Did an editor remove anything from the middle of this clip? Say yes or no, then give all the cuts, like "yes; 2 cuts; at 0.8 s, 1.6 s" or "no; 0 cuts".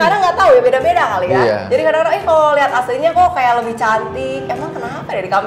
no; 0 cuts